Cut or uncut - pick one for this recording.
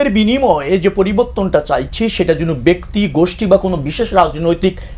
uncut